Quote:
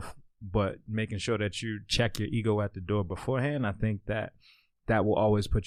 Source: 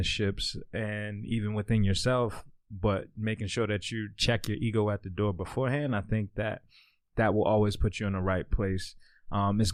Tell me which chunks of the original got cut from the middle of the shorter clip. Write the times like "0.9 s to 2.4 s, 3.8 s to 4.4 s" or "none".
none